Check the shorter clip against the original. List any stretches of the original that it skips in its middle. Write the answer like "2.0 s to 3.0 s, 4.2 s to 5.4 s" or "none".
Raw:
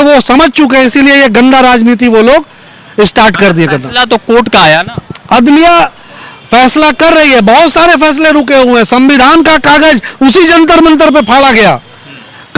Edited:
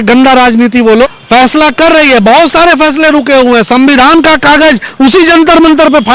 2.3 s to 6.3 s